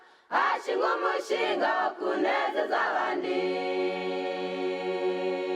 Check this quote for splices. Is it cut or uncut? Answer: uncut